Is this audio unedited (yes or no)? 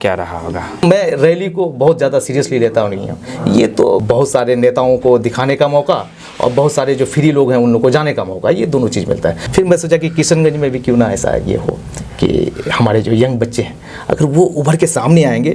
no